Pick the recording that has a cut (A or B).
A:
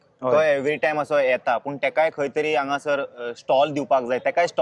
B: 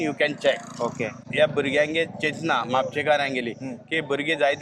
B